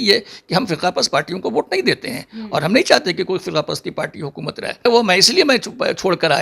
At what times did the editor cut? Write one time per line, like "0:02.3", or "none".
0:04.9